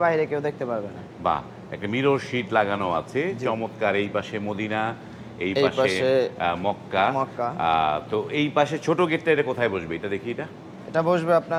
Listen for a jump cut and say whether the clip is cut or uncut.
uncut